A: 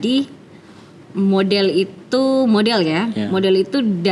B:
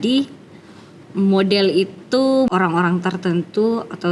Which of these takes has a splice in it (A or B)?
B